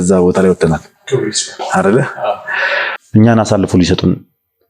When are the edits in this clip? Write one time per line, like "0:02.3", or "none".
0:02.9